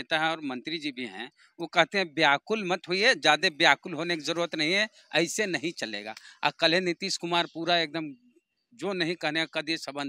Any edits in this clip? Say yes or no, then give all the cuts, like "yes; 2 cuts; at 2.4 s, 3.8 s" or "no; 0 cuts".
no; 0 cuts